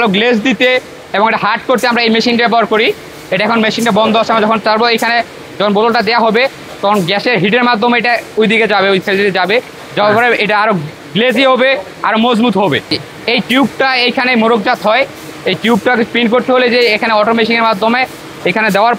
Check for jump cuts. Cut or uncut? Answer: cut